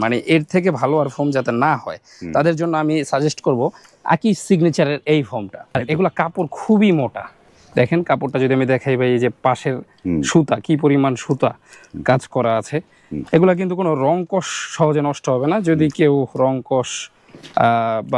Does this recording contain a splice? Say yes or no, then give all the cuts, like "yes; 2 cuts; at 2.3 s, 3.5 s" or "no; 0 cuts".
yes; 2 cuts; at 5.8 s, 7.5 s